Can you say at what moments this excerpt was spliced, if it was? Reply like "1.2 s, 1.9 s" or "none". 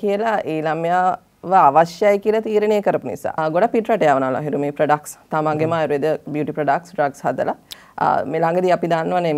3.4 s, 7.7 s

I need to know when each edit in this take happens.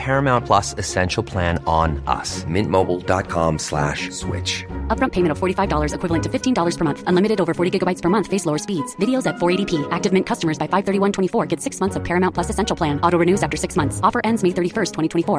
none

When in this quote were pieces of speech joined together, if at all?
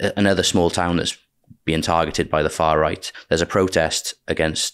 3.1 s

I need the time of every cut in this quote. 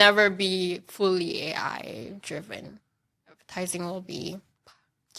none

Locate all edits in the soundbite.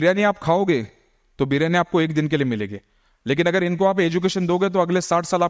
none

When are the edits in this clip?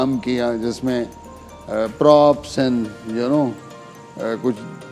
none

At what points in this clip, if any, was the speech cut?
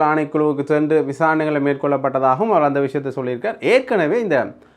none

